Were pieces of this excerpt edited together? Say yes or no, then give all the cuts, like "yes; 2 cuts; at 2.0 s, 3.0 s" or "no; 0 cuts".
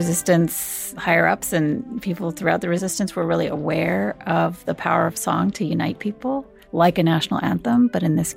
yes; 3 cuts; at 0.9 s, 2.8 s, 6.6 s